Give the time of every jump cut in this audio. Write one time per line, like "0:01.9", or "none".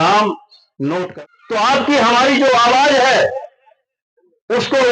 0:01.1